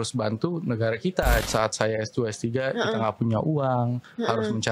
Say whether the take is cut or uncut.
cut